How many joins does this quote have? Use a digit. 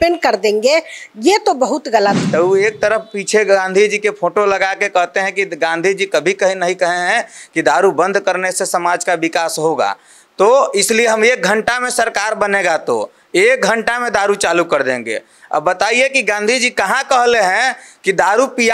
1